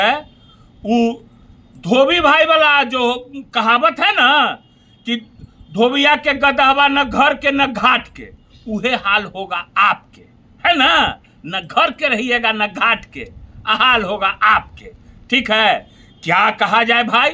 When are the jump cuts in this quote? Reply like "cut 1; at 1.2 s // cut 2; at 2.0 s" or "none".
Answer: none